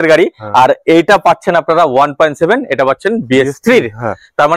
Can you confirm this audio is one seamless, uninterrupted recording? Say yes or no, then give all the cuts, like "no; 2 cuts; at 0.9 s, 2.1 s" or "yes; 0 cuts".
yes; 0 cuts